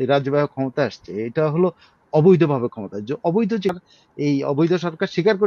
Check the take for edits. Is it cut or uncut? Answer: cut